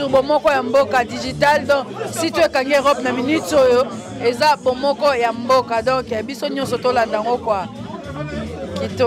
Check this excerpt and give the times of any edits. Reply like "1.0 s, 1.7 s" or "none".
none